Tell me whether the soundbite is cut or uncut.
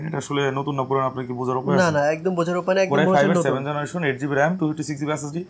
uncut